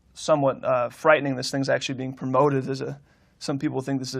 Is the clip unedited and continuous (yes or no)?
no